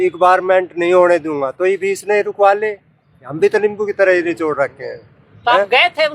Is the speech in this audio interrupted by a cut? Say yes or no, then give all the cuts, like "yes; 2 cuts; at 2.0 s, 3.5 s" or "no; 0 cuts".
no; 0 cuts